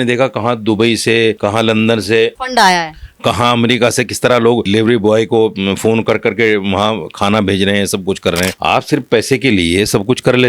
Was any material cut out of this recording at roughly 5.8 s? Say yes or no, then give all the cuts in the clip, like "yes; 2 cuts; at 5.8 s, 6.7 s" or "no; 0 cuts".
no; 4 cuts; at 1.4 s, 2.4 s, 4.6 s, 8.5 s